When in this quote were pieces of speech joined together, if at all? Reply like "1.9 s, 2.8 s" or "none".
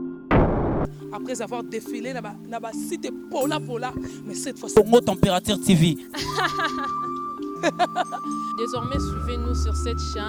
none